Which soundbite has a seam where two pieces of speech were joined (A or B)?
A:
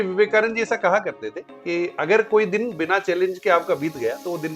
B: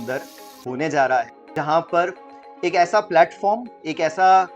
B